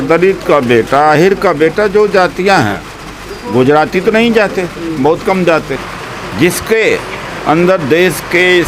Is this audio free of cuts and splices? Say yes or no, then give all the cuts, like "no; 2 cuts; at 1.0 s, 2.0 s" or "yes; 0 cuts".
no; 1 cut; at 5.8 s